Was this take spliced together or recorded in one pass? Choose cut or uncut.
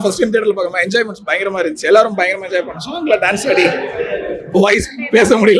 uncut